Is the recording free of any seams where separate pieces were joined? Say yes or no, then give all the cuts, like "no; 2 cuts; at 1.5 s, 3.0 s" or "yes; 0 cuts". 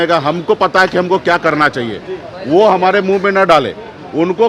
yes; 0 cuts